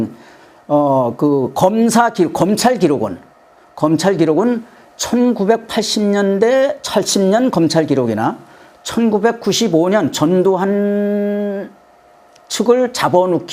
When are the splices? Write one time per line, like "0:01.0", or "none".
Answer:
0:06.0